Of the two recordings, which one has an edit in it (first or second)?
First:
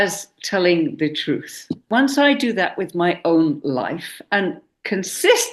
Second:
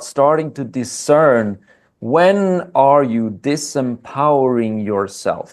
first